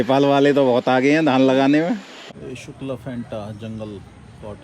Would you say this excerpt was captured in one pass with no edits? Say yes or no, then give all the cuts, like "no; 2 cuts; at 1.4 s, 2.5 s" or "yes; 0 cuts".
no; 1 cut; at 2.1 s